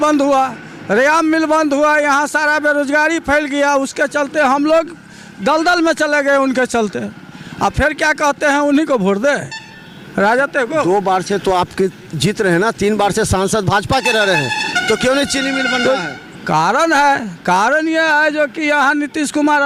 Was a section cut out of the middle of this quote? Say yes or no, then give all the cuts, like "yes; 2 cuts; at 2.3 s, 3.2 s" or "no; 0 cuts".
no; 0 cuts